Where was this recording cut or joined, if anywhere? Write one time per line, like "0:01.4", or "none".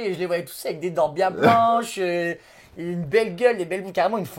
none